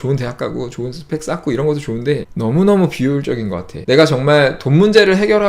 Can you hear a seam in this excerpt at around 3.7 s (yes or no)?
yes